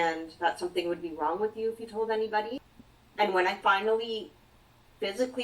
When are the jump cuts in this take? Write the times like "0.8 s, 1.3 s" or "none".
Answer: 2.6 s